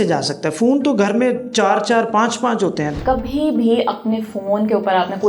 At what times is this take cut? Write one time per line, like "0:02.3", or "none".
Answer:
0:02.9